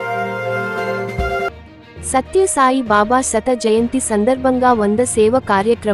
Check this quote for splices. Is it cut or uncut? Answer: uncut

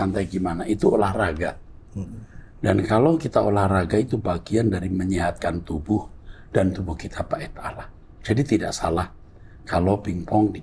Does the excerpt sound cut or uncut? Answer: uncut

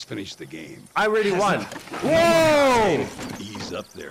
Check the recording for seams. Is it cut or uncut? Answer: uncut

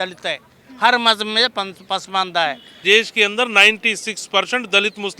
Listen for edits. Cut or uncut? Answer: cut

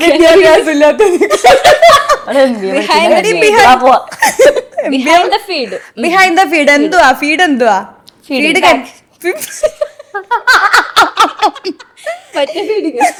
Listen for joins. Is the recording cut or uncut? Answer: uncut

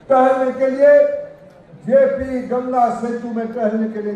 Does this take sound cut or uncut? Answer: uncut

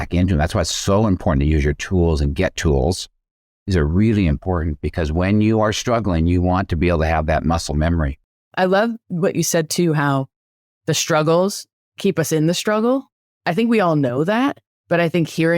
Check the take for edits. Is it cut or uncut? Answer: cut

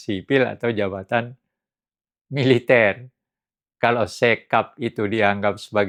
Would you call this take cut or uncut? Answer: uncut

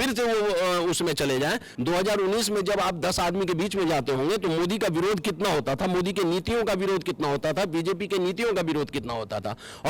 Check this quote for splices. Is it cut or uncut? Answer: cut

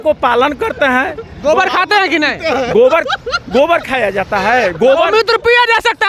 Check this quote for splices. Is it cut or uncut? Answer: uncut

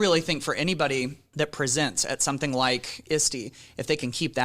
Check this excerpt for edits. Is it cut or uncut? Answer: cut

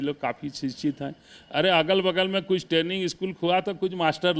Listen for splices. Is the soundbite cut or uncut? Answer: uncut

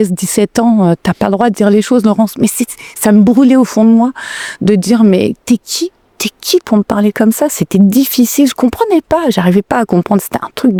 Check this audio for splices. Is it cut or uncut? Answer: uncut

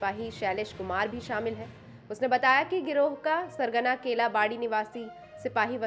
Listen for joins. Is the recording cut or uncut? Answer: uncut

